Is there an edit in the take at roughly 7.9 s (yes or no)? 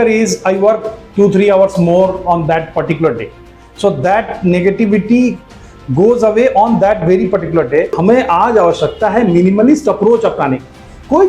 yes